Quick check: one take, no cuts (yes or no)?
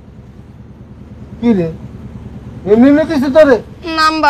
yes